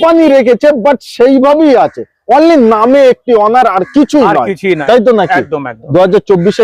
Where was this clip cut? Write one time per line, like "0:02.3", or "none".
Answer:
0:04.8